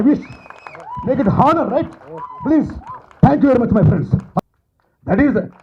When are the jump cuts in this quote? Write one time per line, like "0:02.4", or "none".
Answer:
0:04.4